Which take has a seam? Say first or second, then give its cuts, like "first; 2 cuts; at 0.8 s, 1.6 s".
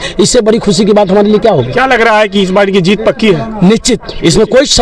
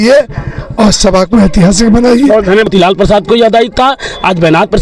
second; 1 cut; at 2.7 s